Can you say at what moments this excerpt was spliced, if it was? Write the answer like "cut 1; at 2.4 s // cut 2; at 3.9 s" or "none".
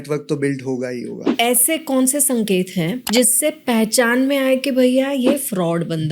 cut 1; at 1.3 s // cut 2; at 3.0 s